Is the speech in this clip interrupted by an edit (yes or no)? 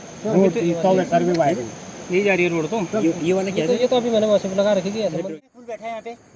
yes